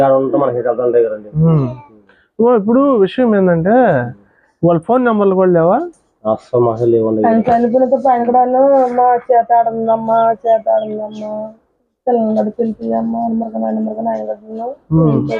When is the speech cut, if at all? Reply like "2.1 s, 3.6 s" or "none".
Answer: 10.1 s